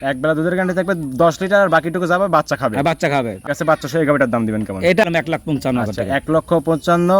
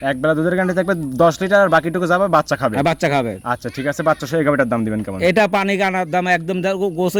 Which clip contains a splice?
first; 2 cuts; at 3.4 s, 5.0 s

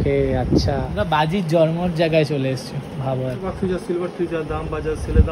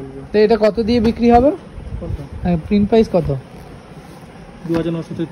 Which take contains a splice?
first; 2 cuts; at 0.9 s, 3.4 s

